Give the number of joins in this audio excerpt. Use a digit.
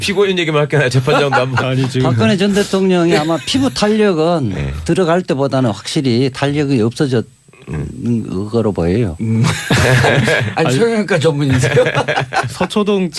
1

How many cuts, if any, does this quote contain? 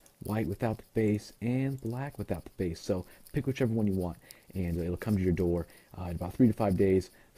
1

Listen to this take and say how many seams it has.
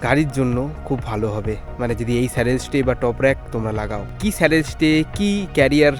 1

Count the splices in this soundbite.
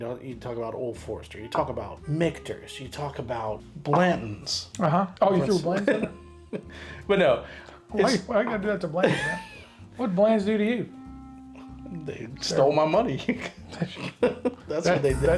3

